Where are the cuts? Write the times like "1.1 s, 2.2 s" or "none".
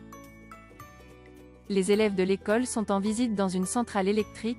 1.4 s